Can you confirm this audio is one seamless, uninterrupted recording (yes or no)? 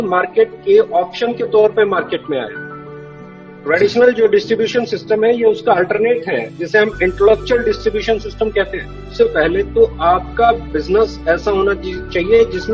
no